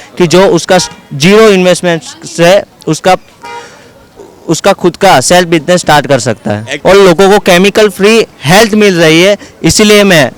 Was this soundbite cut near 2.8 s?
no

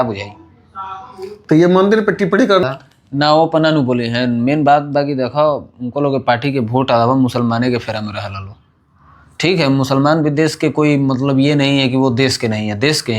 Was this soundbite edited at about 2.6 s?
yes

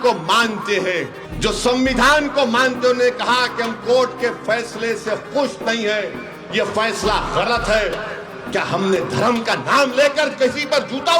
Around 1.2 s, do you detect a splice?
yes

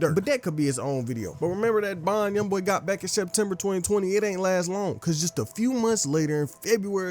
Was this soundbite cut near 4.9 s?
no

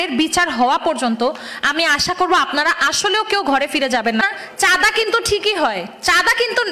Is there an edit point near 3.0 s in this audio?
no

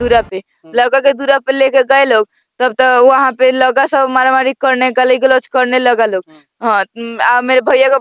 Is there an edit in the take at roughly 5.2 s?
no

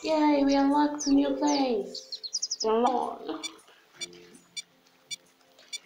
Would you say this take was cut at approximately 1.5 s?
no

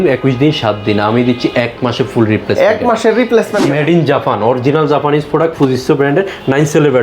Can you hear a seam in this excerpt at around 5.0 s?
no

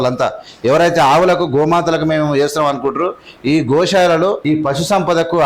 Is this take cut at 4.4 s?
yes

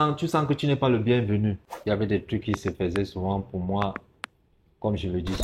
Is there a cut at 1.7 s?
yes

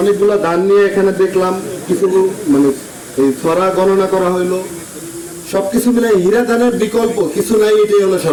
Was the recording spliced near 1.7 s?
no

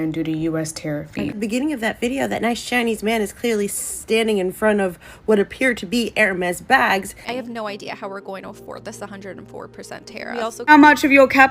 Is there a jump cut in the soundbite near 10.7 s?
yes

